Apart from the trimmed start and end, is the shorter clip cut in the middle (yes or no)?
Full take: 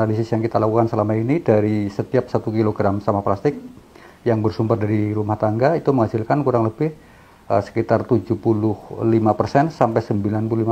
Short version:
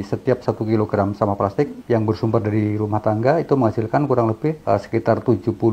yes